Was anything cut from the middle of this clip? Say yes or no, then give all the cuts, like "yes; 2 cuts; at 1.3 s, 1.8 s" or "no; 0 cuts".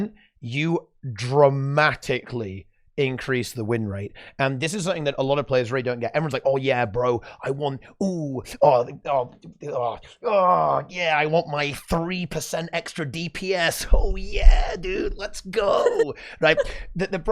no; 0 cuts